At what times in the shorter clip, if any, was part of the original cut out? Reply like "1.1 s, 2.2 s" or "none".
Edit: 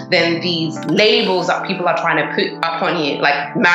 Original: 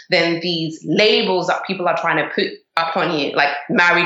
2.6 s